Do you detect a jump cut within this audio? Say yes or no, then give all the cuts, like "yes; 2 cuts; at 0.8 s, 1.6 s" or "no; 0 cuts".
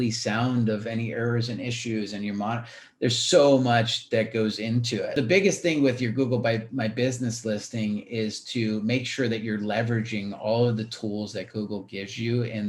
yes; 1 cut; at 5.1 s